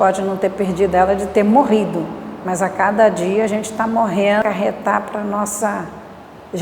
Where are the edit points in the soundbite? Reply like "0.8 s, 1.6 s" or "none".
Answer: 4.4 s